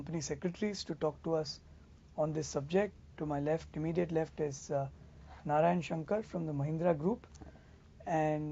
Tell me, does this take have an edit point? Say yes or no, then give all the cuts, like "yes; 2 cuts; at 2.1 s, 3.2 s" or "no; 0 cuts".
no; 0 cuts